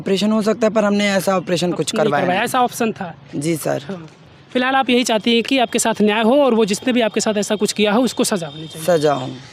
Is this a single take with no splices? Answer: yes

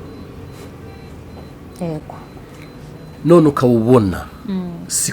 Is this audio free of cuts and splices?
yes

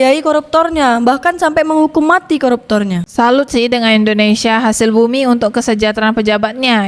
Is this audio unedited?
yes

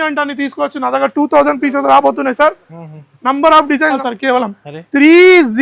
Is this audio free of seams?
no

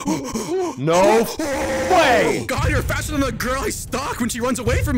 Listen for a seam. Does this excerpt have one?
no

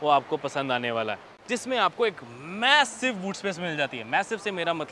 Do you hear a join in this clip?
yes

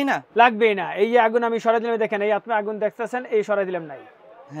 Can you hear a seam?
no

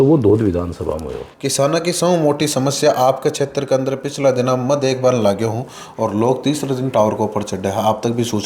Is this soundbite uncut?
no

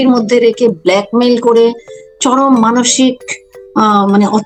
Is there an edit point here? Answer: no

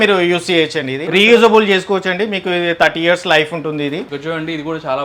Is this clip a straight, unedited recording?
no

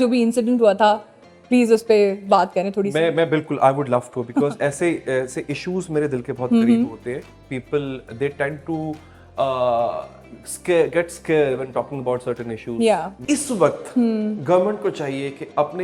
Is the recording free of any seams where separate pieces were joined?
no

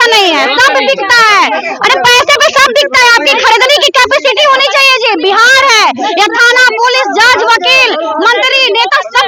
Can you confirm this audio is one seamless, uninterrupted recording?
yes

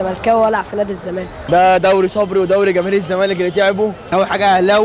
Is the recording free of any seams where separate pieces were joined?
no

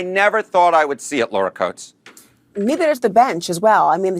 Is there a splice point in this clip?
yes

